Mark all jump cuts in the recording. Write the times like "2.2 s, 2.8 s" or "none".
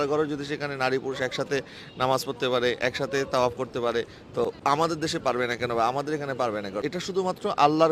4.6 s, 6.8 s